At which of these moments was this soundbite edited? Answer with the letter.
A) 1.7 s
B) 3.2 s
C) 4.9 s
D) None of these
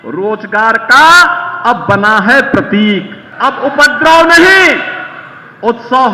B